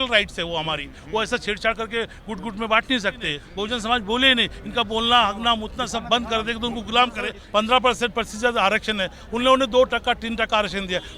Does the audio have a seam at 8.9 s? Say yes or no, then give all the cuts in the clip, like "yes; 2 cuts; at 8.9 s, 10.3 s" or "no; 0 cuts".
no; 2 cuts; at 3.4 s, 7.4 s